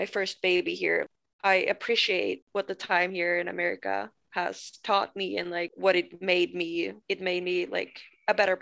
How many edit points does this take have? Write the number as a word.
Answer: four